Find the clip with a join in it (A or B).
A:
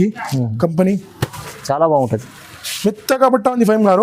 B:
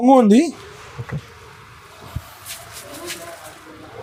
A